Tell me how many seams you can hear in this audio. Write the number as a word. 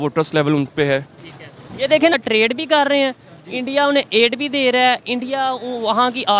one